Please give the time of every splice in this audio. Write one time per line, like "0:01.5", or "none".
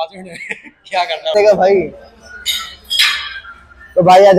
0:01.3